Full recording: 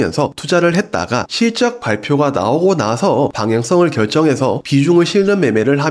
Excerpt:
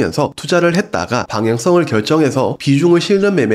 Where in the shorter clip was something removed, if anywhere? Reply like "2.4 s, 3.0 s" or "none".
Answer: 1.3 s